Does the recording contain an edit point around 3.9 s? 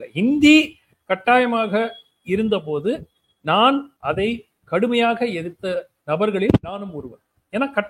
yes; 1 cut; at 3.9 s

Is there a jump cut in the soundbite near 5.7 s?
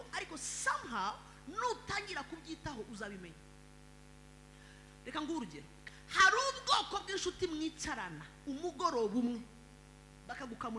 yes; 1 cut; at 5.7 s

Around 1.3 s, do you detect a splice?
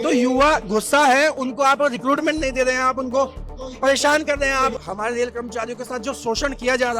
no; 1 cut; at 4.8 s

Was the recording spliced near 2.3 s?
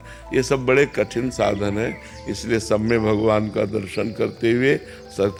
no; 0 cuts

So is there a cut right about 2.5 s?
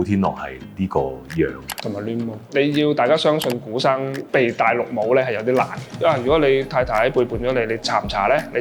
yes; 3 cuts; at 2.5 s, 4.2 s, 6.0 s

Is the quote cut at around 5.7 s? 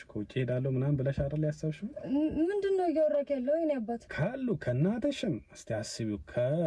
no; 1 cut; at 4.1 s

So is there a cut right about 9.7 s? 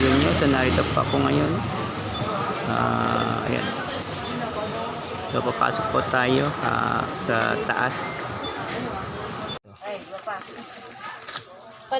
yes; 1 cut; at 9.7 s

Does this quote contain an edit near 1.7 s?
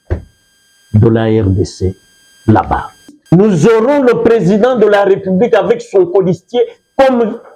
no; 1 cut; at 3.2 s

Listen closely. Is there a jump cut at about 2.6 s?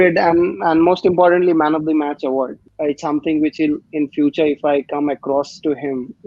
yes; 1 cut; at 2.6 s

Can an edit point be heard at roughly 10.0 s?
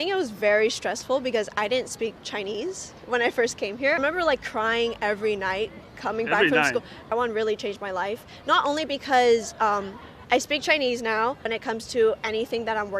no; 3 cuts; at 4.0 s, 7.0 s, 11.4 s

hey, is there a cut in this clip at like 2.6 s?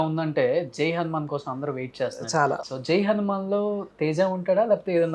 yes; 1 cut; at 2.6 s

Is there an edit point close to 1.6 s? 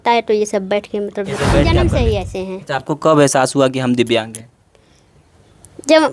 yes; 1 cut; at 1.6 s

